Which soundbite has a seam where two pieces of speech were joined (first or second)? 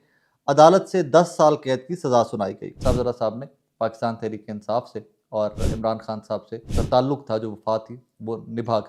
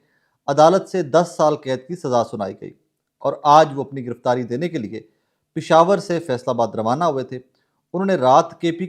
first